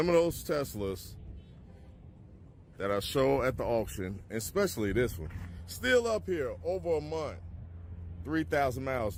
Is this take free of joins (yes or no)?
yes